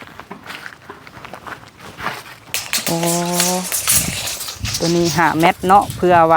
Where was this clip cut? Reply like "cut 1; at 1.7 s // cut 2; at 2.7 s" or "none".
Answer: none